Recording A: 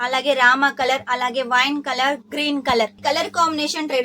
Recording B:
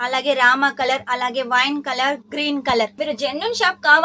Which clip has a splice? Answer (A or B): B